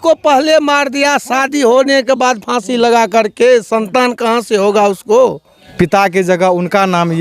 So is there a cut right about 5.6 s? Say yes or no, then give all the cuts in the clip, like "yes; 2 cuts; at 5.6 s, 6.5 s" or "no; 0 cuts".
yes; 1 cut; at 5.6 s